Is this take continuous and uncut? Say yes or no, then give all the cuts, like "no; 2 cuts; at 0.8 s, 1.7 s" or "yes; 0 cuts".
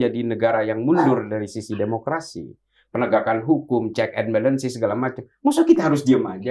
yes; 0 cuts